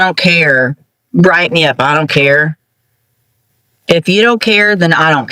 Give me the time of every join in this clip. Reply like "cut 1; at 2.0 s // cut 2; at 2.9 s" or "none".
none